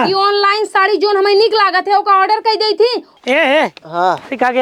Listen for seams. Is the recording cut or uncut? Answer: cut